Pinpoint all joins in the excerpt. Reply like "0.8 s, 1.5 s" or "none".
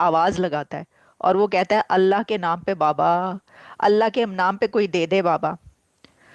none